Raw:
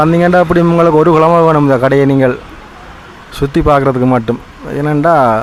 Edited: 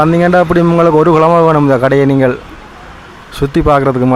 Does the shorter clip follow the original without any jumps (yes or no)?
yes